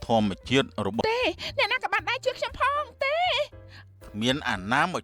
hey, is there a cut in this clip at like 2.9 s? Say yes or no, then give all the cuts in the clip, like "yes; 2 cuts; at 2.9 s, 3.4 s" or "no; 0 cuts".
no; 1 cut; at 1.0 s